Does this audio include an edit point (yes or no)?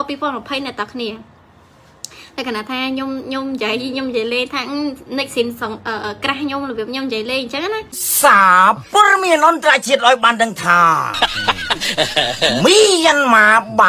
yes